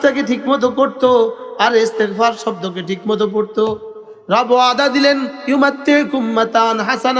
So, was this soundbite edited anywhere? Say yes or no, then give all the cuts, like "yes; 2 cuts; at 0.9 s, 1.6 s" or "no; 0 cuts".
no; 0 cuts